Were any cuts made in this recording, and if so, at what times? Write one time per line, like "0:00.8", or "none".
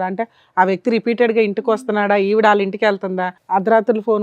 0:03.3